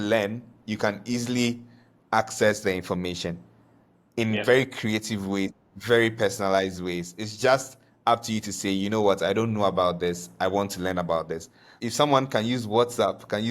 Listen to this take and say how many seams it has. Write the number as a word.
one